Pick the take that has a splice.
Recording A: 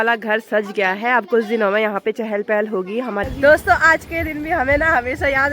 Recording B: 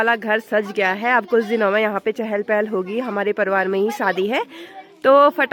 A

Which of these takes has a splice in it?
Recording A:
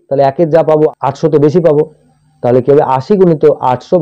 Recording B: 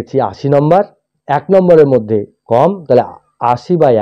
A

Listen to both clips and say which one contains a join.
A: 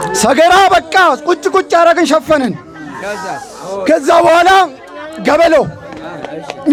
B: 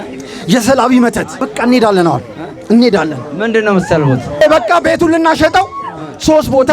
B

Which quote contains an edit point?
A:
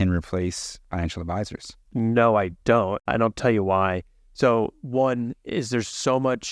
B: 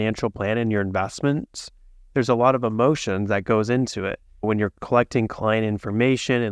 A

